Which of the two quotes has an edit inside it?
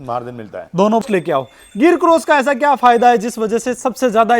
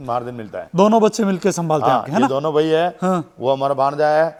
first; 1 cut; at 1.0 s

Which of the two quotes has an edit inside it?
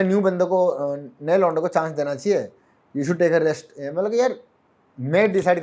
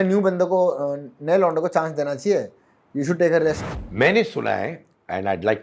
second; 1 cut; at 3.7 s

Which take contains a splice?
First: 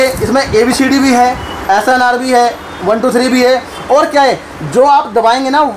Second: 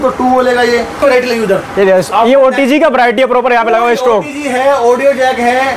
second; 1 cut; at 0.9 s

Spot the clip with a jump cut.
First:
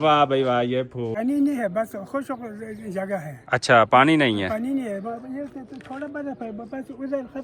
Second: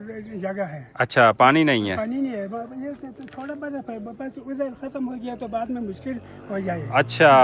first; 1 cut; at 1.1 s

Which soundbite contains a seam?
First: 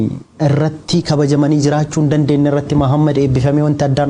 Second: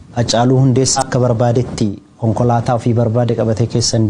second; 1 cut; at 1.0 s

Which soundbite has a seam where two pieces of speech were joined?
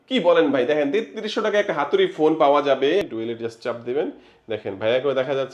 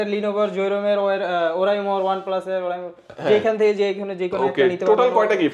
first; 1 cut; at 3.0 s

